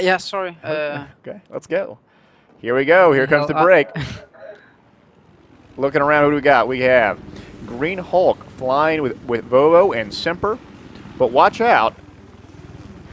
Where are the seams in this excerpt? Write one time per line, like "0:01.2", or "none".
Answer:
0:05.4

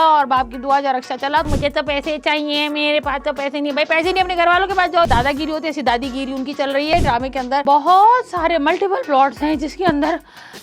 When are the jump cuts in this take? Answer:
0:01.5
0:05.1
0:06.9

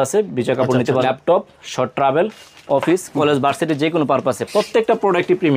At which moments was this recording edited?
0:01.0

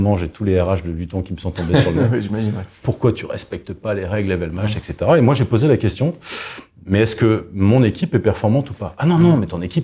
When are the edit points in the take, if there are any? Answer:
none

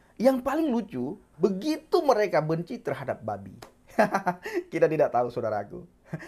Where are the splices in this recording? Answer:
0:01.2

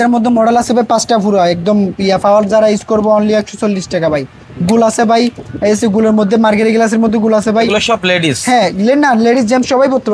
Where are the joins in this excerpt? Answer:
none

